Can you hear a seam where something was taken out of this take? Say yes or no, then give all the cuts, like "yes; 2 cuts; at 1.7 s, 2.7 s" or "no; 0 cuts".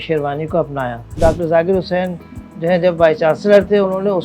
yes; 1 cut; at 1.1 s